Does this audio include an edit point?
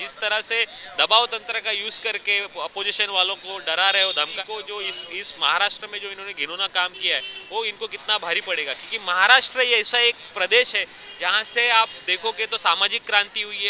yes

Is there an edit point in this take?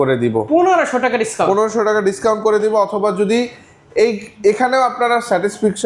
no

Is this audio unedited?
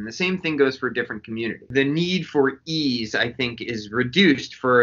no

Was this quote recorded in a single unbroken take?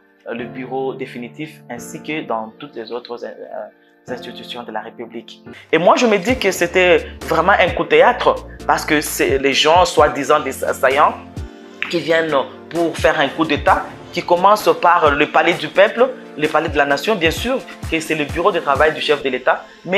no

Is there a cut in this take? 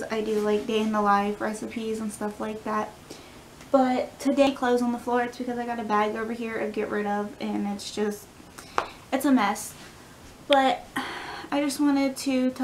yes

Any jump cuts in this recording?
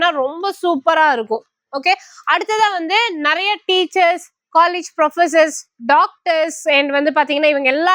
no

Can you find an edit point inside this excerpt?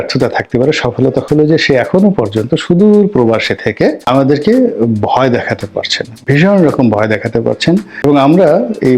yes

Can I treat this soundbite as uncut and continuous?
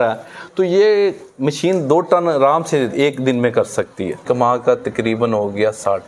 no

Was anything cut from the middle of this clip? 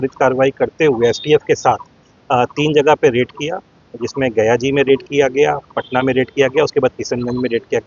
no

